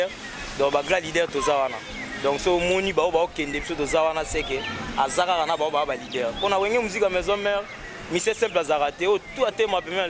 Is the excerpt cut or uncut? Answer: uncut